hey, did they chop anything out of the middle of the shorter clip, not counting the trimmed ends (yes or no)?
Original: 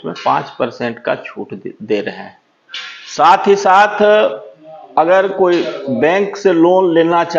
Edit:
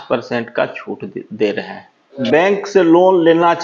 yes